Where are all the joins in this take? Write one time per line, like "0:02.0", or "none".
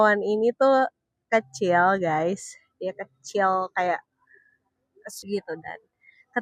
0:05.2